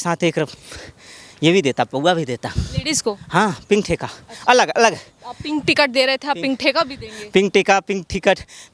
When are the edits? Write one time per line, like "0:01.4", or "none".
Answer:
none